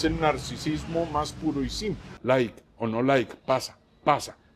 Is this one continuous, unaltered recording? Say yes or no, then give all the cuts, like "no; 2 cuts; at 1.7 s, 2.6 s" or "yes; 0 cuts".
no; 1 cut; at 2.1 s